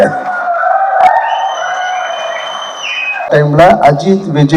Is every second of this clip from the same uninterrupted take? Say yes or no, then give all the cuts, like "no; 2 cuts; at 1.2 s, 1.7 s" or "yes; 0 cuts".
no; 1 cut; at 3.3 s